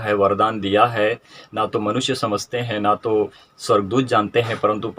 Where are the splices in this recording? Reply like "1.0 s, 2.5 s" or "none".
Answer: none